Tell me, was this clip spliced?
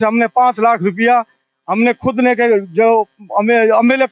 no; 0 cuts

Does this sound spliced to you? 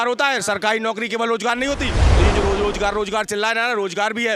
yes; 1 cut; at 2.0 s

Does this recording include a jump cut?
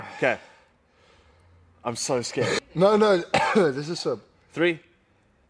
yes; 1 cut; at 2.7 s

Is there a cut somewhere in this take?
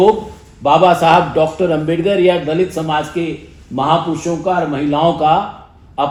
no; 0 cuts

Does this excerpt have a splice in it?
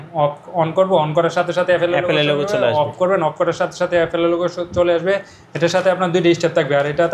no; 0 cuts

